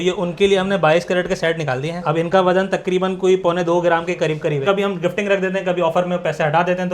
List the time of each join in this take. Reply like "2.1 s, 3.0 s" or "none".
4.6 s